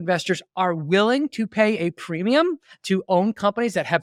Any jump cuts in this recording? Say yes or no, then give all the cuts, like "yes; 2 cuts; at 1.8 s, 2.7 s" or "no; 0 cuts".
no; 0 cuts